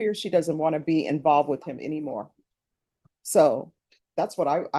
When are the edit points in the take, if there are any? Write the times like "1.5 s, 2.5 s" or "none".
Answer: none